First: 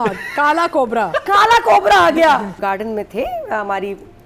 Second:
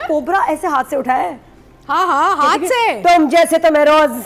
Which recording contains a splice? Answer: first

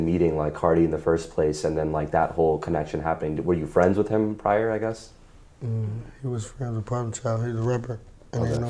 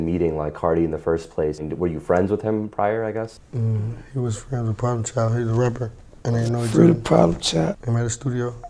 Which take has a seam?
second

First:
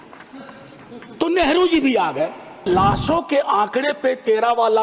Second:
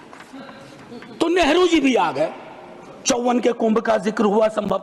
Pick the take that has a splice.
first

